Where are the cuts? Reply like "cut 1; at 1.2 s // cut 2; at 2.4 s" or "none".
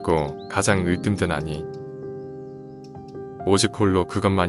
cut 1; at 1.7 s // cut 2; at 3.4 s